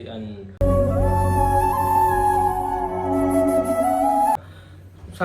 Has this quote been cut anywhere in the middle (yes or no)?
yes